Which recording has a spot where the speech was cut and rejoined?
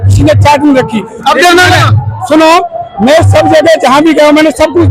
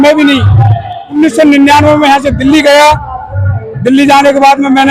second; 1 cut; at 1.1 s

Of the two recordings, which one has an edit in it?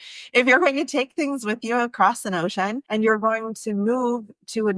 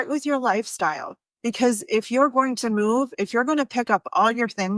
first; 1 cut; at 2.8 s

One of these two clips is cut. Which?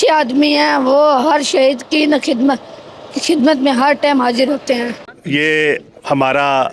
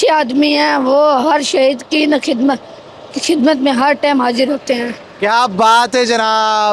first; 1 cut; at 5.1 s

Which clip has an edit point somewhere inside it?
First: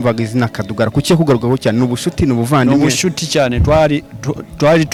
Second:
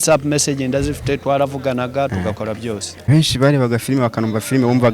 second; 1 cut; at 2.9 s

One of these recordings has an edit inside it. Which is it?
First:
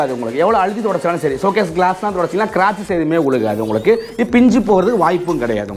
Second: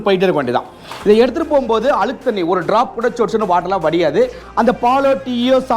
second; 1 cut; at 4.4 s

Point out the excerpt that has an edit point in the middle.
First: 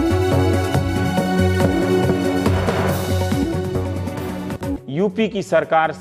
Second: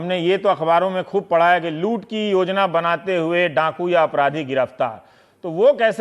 second; 1 cut; at 1.3 s

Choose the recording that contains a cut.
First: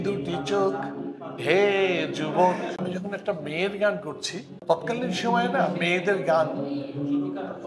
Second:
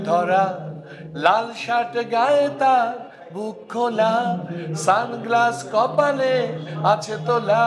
first; 2 cuts; at 2.8 s, 4.6 s

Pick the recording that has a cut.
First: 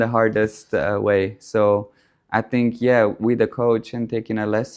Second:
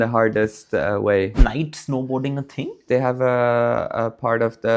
second; 2 cuts; at 1.4 s, 2.8 s

